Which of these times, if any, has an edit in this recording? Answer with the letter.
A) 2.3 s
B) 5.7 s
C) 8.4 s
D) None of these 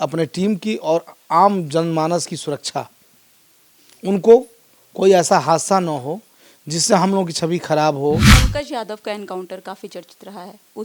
C